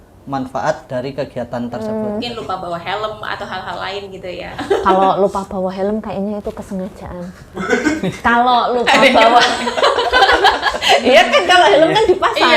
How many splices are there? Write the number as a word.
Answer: one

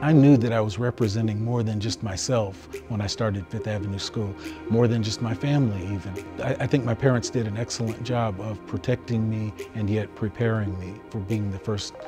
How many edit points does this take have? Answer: two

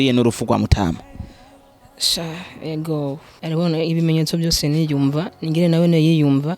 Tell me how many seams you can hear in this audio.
one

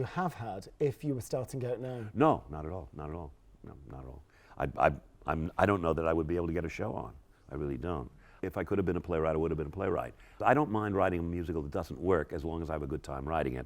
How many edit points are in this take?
two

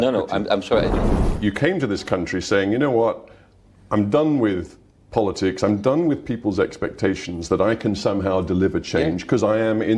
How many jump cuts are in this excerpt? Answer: one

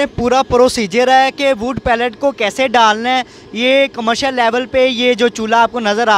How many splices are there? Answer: zero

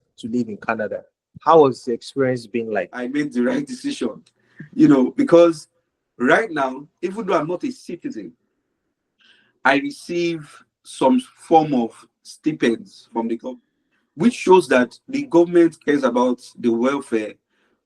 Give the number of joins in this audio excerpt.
two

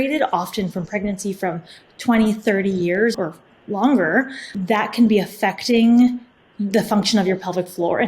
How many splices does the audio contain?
two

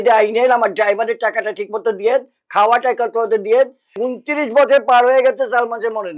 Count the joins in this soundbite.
one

